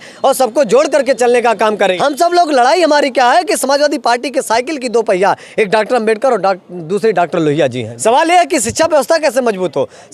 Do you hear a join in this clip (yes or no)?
yes